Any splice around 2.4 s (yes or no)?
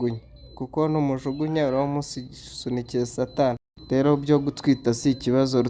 no